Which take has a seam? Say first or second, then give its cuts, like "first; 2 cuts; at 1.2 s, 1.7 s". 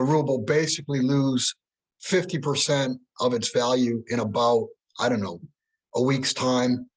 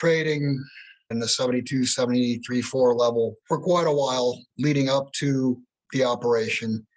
second; 3 cuts; at 1.1 s, 3.4 s, 4.5 s